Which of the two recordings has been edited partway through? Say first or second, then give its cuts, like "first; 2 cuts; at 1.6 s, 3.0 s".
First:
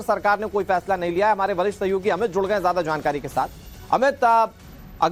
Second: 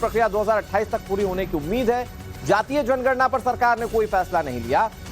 second; 1 cut; at 0.9 s